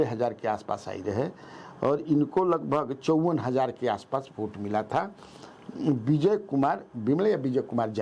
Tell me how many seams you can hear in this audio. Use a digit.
0